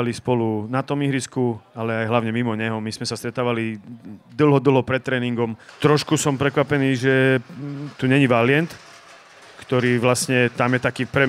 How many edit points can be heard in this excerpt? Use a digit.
1